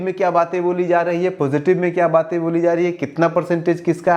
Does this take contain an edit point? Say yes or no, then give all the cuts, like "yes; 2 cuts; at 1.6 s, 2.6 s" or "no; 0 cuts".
no; 0 cuts